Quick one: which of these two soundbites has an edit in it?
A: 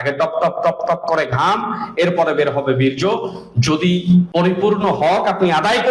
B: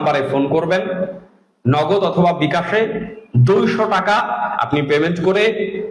A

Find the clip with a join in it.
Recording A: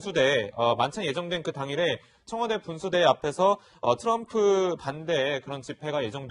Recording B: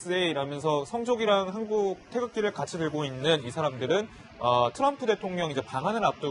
B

